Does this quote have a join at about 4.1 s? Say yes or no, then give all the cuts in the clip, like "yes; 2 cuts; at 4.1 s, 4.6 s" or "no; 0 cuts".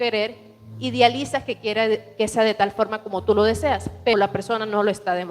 yes; 1 cut; at 4.1 s